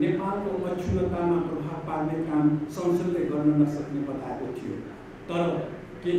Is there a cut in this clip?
no; 0 cuts

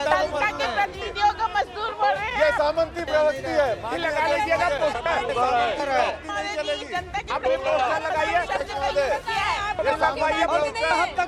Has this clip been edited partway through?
no; 0 cuts

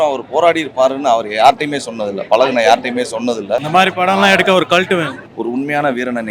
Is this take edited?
yes; 2 cuts; at 3.7 s, 5.2 s

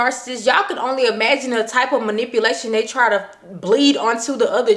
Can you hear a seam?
no; 0 cuts

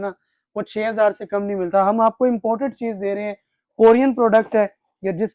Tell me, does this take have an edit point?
no; 0 cuts

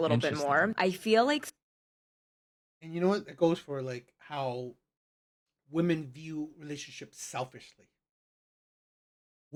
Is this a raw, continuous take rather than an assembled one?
yes; 0 cuts

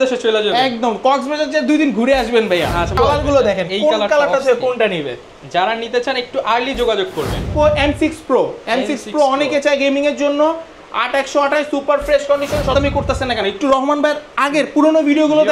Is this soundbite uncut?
no; 3 cuts; at 2.9 s, 7.5 s, 12.7 s

